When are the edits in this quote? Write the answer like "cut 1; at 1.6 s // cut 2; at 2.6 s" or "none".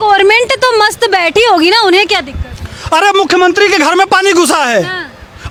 none